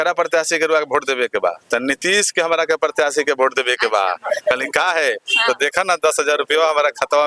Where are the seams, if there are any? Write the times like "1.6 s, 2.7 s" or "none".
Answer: none